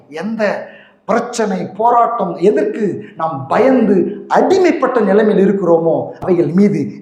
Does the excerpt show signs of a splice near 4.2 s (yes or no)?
no